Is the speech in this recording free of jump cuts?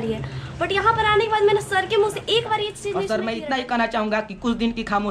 no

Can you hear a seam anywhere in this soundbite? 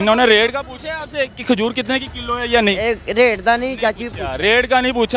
no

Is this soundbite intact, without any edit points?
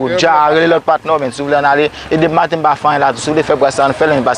yes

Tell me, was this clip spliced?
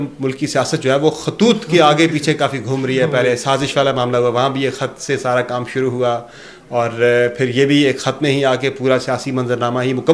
no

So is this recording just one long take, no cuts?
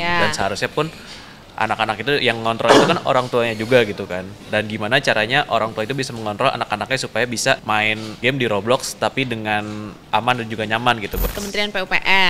no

